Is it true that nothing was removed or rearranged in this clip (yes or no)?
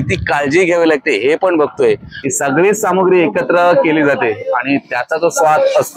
no